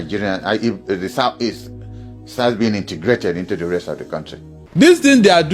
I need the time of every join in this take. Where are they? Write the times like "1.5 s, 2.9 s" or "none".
4.6 s